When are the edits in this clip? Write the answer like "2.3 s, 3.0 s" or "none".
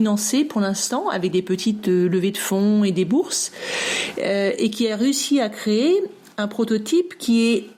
none